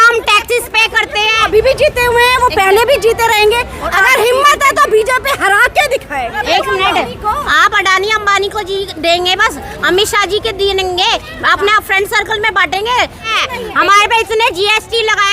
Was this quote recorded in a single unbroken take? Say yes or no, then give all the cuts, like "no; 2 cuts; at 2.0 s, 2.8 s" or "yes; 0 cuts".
no; 3 cuts; at 1.4 s, 6.4 s, 13.3 s